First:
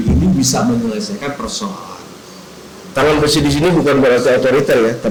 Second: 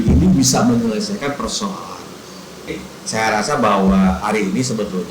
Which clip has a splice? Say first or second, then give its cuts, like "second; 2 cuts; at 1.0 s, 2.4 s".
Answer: second; 1 cut; at 2.8 s